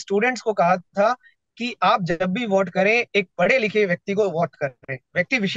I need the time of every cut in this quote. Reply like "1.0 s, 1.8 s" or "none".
none